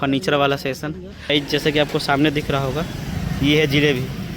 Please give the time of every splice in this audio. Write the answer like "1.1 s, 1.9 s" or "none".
1.3 s

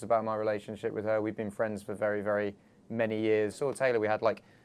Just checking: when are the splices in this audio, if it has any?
3.6 s

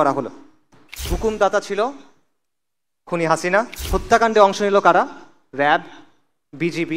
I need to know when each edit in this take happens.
1.1 s, 3.8 s

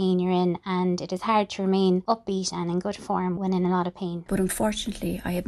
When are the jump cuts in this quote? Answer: 2.0 s, 3.3 s, 4.2 s

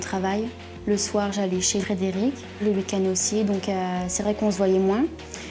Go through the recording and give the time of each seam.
2.5 s

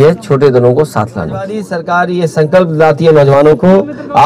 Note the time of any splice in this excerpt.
1.7 s

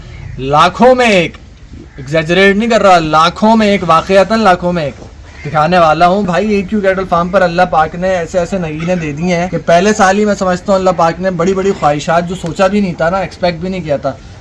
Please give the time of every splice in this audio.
6.2 s, 9.5 s

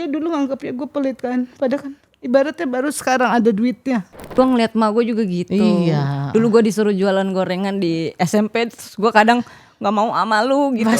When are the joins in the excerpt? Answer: 4.3 s

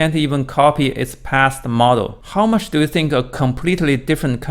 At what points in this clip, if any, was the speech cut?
2.2 s

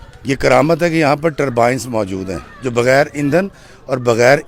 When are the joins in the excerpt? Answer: none

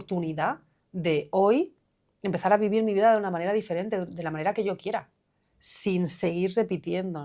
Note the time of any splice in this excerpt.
none

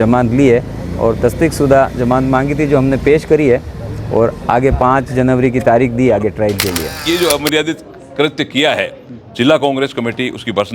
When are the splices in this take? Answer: 6.8 s

